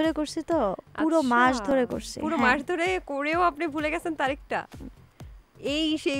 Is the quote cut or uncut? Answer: uncut